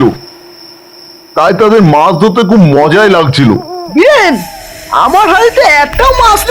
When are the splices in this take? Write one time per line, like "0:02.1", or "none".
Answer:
0:03.8